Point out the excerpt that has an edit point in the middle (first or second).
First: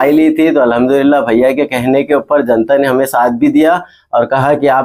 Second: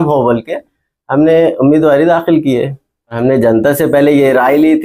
second